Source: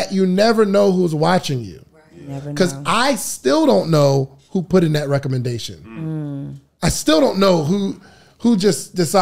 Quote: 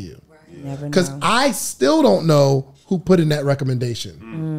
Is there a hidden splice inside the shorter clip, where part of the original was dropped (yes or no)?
no